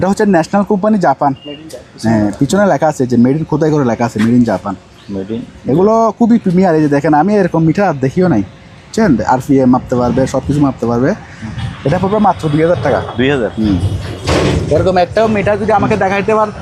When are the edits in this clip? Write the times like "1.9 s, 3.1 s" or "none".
none